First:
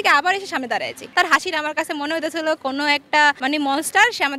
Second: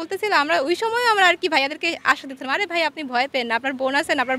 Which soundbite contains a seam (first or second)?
first